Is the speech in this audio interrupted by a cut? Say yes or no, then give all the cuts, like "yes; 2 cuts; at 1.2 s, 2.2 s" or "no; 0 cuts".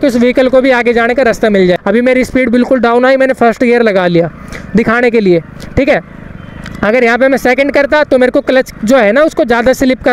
yes; 1 cut; at 1.8 s